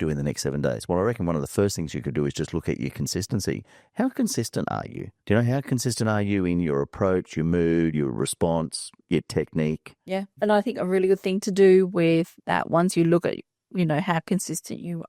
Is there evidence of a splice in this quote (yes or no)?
no